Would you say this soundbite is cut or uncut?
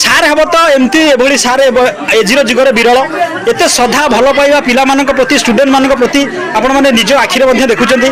uncut